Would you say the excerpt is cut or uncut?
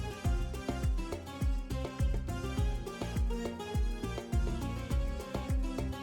uncut